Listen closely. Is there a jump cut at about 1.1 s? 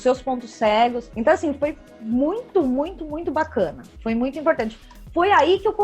yes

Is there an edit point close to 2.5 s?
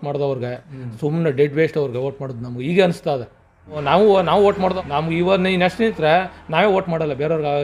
no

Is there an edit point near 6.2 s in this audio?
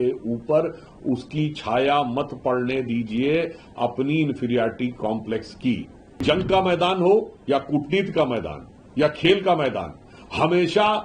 yes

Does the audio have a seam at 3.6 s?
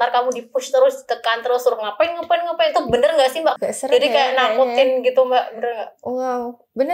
yes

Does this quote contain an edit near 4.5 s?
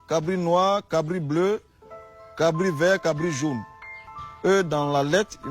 yes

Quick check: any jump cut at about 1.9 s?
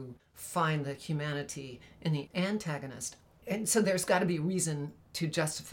no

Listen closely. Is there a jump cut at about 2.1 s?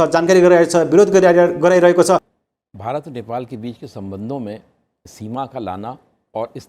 yes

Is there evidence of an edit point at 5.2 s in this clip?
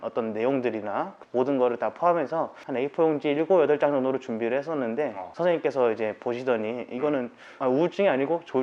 yes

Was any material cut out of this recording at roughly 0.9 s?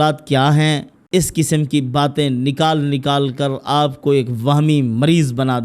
yes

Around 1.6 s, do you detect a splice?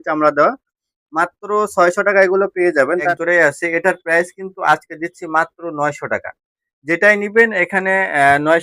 no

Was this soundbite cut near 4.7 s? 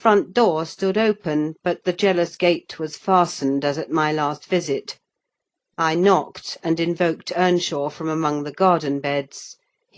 no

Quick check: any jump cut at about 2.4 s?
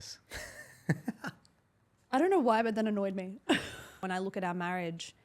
no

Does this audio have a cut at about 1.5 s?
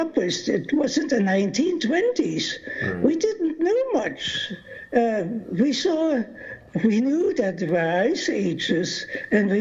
no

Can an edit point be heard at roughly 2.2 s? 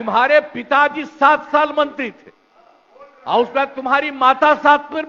no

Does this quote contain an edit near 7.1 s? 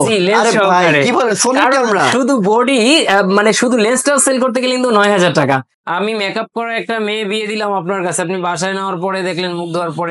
no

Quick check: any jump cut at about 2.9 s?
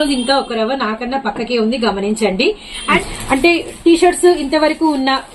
yes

